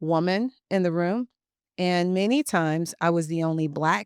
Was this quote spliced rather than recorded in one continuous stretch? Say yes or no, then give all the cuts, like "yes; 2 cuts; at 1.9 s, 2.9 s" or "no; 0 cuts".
no; 0 cuts